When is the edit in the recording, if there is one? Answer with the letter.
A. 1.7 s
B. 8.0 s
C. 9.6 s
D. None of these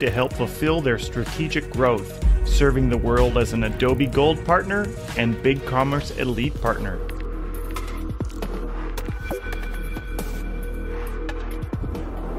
D